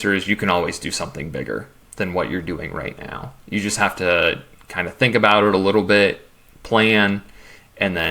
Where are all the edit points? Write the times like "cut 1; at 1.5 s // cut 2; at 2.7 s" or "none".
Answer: cut 1; at 1.8 s